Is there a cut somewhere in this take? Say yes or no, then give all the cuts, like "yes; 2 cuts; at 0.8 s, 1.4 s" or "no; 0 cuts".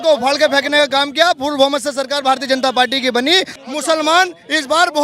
yes; 1 cut; at 3.5 s